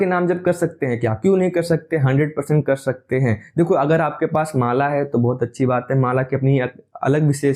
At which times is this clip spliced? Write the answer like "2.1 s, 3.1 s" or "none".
none